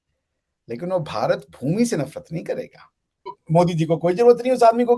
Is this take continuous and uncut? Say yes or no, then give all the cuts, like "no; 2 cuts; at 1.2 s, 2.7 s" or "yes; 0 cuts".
no; 1 cut; at 3.3 s